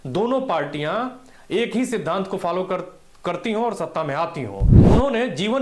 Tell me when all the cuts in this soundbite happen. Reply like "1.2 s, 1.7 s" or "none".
4.7 s